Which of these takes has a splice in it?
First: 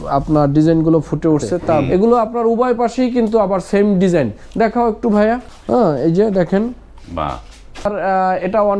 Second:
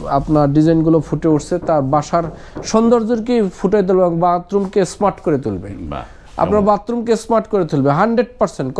first; 3 cuts; at 1.8 s, 5.5 s, 7.9 s

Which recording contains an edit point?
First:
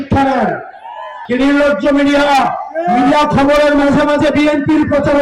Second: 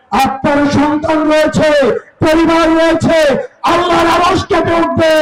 first; 1 cut; at 1.2 s

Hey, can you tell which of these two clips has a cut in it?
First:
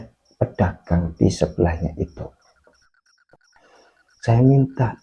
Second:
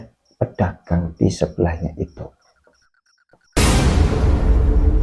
first; 1 cut; at 3.4 s

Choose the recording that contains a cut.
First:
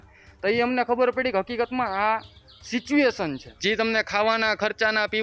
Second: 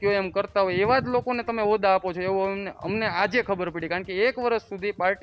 first; 1 cut; at 3.5 s

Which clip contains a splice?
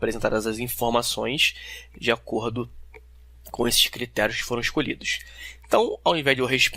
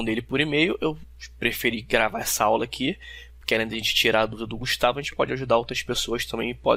first; 1 cut; at 4.4 s

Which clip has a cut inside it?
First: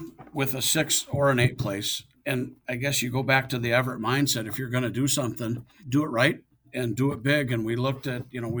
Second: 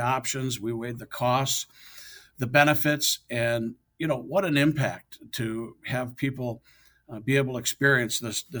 first; 3 cuts; at 2.2 s, 5.8 s, 6.7 s

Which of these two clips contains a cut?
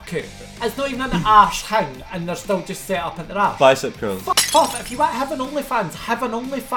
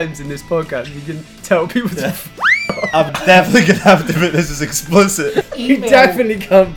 second; 2 cuts; at 3.1 s, 5.5 s

